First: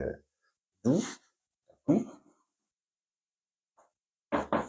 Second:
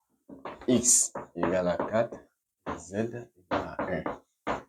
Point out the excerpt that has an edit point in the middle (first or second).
first